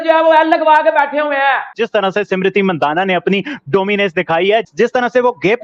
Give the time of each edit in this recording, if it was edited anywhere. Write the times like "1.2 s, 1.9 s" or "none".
1.7 s